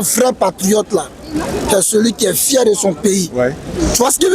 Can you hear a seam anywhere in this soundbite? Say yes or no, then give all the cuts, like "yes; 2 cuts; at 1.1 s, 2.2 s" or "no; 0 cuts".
no; 0 cuts